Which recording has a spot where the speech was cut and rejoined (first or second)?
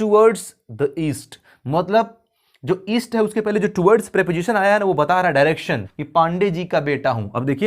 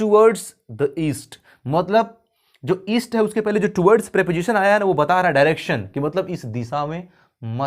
first